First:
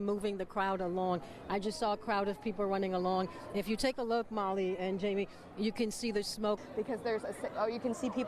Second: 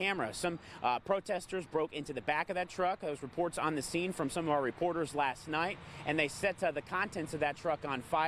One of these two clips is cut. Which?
first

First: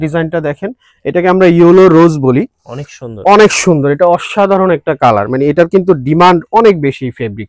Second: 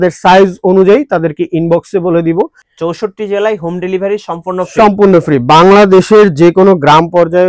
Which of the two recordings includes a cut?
second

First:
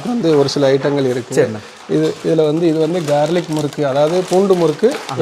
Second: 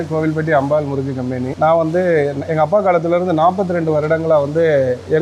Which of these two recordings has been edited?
second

